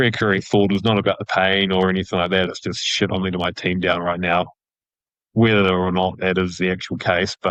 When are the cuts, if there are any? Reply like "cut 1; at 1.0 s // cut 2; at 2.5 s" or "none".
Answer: none